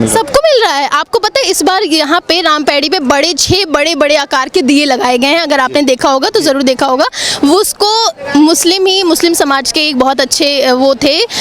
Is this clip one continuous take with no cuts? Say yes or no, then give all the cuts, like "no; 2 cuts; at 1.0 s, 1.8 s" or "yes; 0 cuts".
yes; 0 cuts